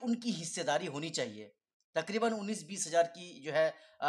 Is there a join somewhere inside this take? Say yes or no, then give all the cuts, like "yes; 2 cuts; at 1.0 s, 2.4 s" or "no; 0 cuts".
no; 0 cuts